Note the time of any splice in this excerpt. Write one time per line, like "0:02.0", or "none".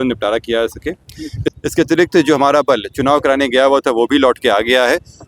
0:01.4